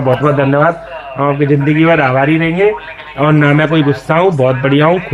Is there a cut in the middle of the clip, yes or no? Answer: yes